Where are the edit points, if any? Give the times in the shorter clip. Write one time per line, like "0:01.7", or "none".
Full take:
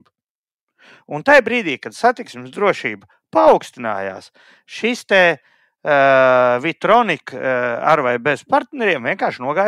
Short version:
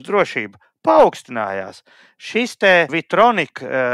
0:03.0